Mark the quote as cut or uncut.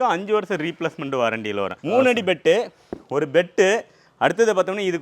cut